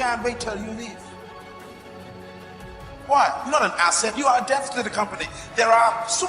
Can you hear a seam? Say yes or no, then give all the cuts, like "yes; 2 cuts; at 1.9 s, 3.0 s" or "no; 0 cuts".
no; 0 cuts